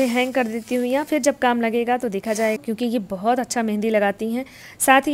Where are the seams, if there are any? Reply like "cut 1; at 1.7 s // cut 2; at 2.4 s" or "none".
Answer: cut 1; at 2.6 s